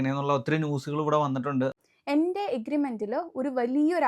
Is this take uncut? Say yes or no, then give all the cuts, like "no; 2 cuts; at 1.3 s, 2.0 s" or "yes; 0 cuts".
no; 1 cut; at 1.8 s